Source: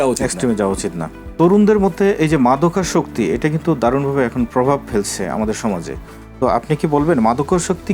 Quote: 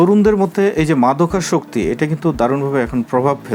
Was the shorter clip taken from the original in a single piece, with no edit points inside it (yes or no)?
yes